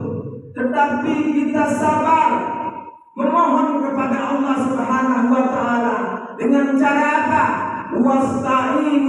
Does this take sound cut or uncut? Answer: uncut